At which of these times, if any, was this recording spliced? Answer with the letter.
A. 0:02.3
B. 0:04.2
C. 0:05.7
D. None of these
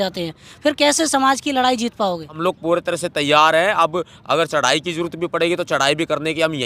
A